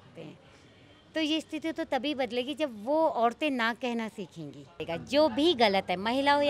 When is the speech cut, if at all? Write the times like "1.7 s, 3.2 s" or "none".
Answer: 4.8 s